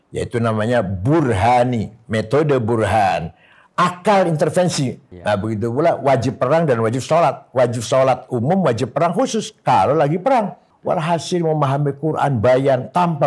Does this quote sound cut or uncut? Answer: cut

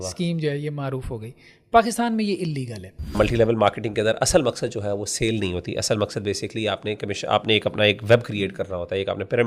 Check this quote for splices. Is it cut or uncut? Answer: cut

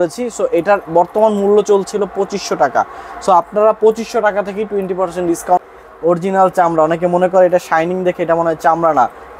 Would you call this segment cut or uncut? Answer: cut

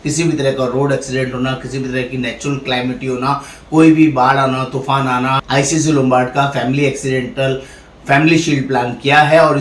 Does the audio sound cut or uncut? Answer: cut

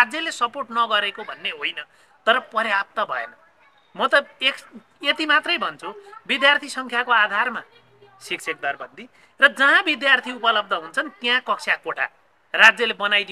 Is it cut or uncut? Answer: uncut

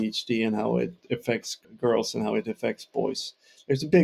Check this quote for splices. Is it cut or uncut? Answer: cut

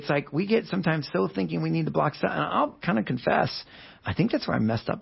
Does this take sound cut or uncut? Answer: uncut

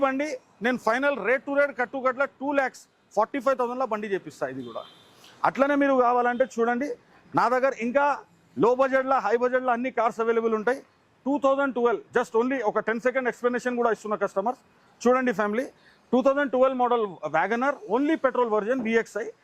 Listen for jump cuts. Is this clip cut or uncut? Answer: uncut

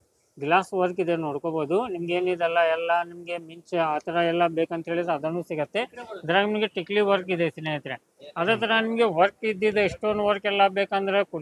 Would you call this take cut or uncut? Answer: uncut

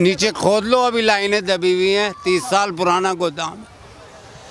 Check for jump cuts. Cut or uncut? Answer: uncut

